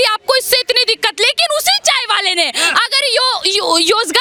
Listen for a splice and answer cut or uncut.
uncut